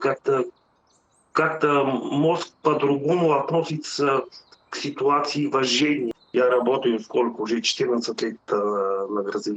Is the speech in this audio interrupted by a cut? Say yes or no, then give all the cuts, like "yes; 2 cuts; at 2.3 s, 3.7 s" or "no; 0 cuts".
yes; 1 cut; at 6.1 s